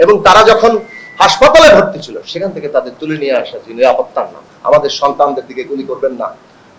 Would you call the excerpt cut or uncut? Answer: cut